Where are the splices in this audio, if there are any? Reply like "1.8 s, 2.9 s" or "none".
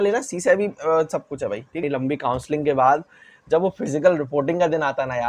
1.8 s